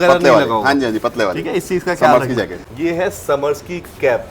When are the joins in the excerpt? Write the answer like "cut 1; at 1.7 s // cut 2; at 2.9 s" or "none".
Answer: cut 1; at 2.6 s

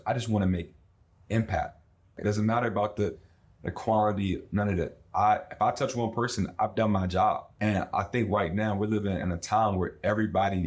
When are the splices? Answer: cut 1; at 2.1 s // cut 2; at 7.5 s

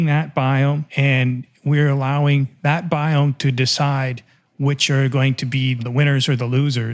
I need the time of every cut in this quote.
cut 1; at 0.9 s // cut 2; at 5.8 s

